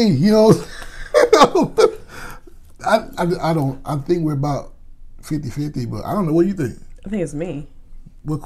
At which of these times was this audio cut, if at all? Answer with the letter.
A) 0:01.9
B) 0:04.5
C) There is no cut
C